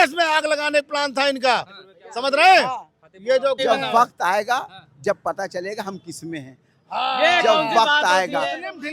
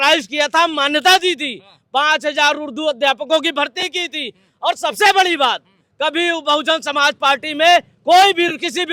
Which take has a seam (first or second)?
first